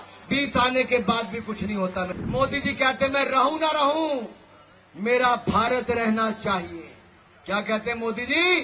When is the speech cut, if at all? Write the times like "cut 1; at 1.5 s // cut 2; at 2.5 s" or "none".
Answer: cut 1; at 2.2 s

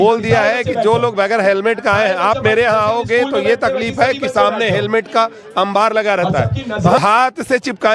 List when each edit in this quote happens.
cut 1; at 7.0 s

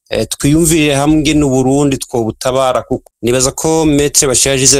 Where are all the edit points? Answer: cut 1; at 3.1 s

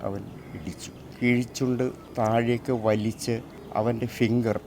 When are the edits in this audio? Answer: cut 1; at 1.0 s // cut 2; at 2.0 s // cut 3; at 3.6 s

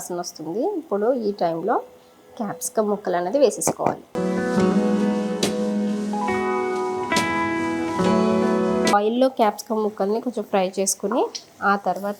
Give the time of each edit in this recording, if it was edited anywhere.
none

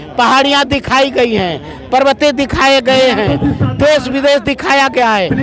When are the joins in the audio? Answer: none

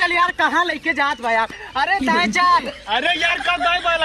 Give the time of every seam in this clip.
none

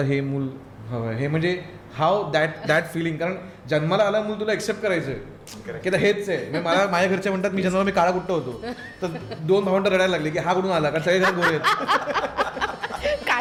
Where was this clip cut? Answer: none

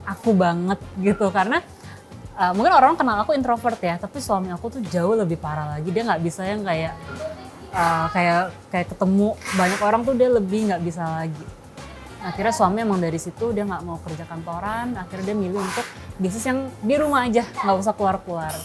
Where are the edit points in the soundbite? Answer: none

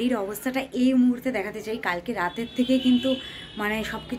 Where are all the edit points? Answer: none

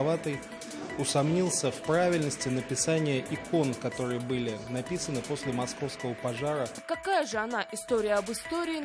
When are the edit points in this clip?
none

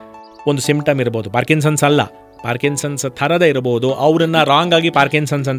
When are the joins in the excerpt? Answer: none

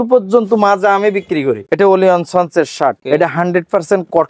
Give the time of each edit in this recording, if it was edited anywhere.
cut 1; at 1.6 s // cut 2; at 3.0 s

